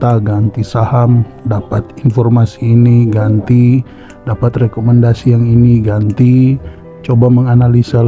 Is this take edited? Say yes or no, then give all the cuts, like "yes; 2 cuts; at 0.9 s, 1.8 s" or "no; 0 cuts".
no; 0 cuts